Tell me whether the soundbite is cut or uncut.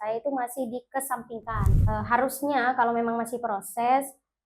cut